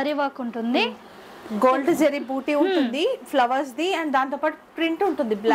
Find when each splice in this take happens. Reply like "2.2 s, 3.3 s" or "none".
none